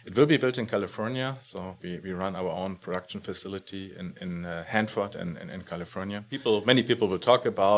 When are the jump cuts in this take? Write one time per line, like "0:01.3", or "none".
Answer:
0:06.4